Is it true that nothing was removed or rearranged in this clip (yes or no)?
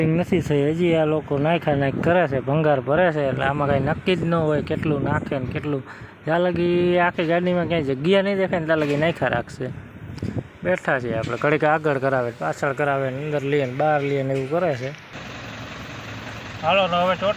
no